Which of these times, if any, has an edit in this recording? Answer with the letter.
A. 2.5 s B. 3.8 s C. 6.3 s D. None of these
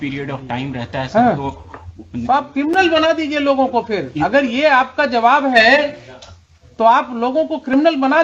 D